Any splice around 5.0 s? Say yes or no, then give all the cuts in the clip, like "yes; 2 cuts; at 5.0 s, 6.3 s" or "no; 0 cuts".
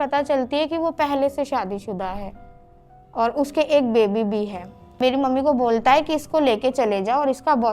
yes; 1 cut; at 5.0 s